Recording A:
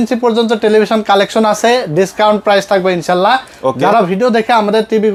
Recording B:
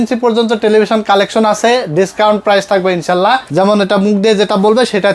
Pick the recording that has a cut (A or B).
B